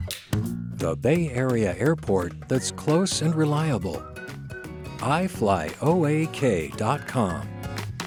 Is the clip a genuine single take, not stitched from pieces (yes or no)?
yes